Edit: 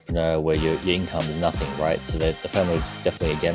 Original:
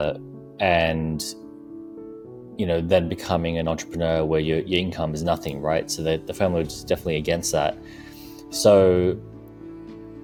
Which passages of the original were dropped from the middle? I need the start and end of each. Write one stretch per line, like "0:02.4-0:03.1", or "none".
none